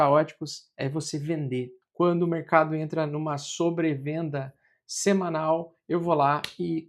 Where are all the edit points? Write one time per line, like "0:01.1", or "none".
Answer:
0:01.8